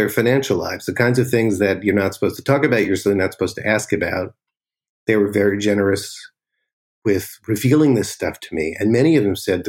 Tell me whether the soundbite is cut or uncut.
cut